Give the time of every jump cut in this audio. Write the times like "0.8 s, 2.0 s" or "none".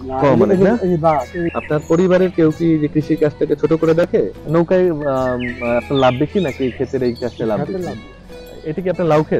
1.4 s, 4.4 s, 8.5 s